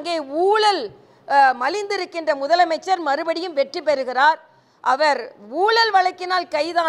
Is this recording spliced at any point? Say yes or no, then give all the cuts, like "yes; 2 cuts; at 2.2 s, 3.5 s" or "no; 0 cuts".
no; 0 cuts